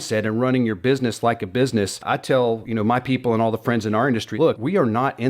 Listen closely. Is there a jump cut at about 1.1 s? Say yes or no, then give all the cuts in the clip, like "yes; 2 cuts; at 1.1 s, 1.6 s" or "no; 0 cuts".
no; 2 cuts; at 2.4 s, 4.4 s